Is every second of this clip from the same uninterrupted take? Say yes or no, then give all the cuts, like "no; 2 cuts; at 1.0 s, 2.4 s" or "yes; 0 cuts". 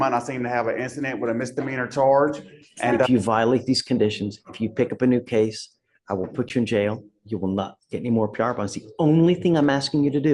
no; 1 cut; at 3.1 s